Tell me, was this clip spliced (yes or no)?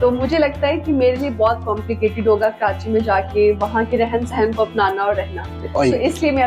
no